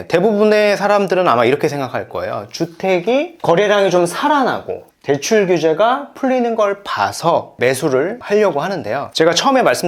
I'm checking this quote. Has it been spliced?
no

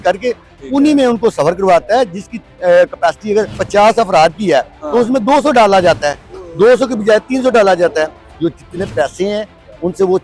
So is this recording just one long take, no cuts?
no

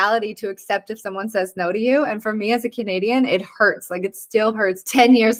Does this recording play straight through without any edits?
yes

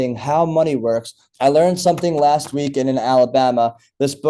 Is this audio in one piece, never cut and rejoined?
no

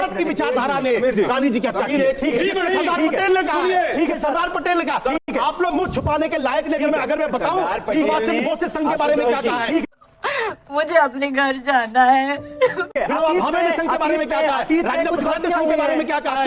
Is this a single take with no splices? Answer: yes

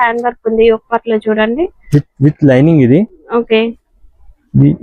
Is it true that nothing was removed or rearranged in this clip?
yes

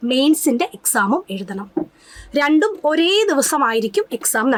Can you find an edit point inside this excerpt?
no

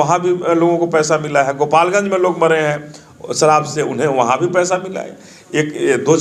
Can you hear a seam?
no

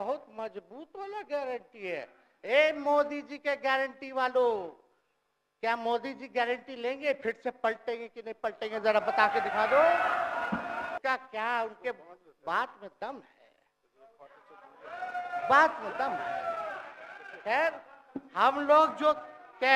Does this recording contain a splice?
yes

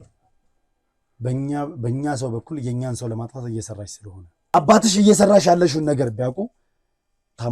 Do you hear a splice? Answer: yes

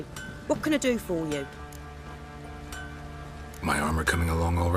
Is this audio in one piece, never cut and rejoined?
no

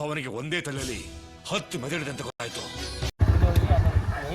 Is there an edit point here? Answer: yes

